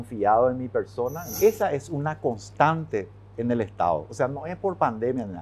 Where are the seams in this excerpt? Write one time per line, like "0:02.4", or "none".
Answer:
0:01.2